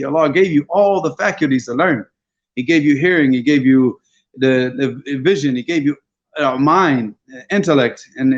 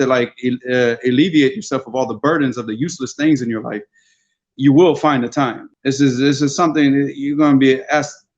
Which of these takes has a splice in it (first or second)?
second